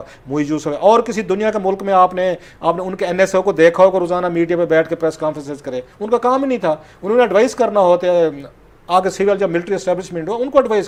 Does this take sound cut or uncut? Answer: uncut